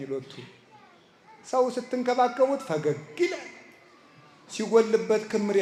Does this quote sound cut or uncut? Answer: uncut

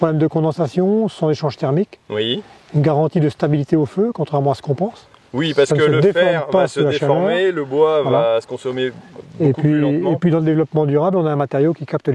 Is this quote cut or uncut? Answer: uncut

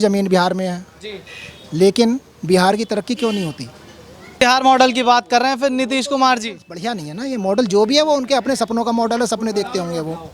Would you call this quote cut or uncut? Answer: cut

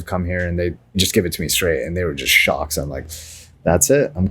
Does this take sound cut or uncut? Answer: cut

